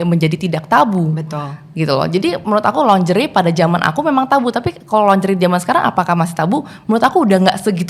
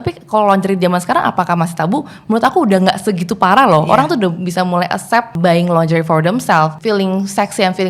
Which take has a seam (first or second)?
second